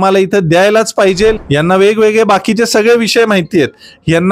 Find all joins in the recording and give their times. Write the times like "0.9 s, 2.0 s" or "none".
1.4 s